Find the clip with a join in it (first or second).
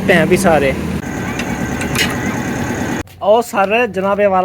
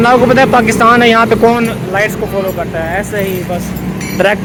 first